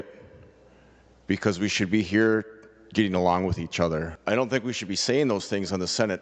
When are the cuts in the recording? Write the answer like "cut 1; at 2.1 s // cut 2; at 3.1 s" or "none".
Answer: cut 1; at 4.1 s